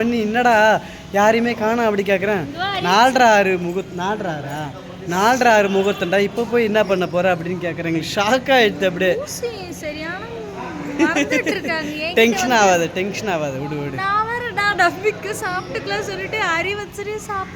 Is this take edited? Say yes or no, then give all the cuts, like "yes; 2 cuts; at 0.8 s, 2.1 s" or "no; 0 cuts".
no; 0 cuts